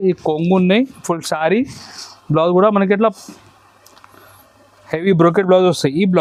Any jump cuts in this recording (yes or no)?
no